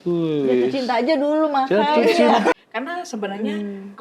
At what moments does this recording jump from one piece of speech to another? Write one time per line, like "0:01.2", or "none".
0:02.5